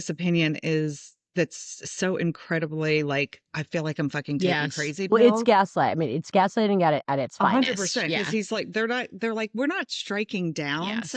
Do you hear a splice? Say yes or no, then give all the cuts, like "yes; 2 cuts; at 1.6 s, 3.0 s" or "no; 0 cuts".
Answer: no; 0 cuts